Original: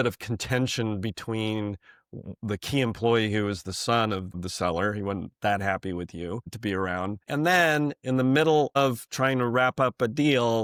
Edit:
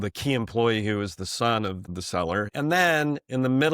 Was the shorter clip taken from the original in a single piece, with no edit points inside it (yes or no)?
no